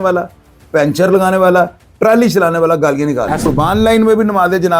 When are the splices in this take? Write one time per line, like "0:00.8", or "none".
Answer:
0:03.5